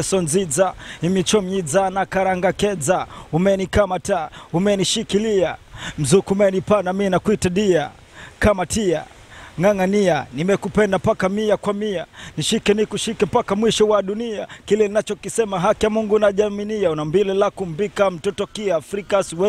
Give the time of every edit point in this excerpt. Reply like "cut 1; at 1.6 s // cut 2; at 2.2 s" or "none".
none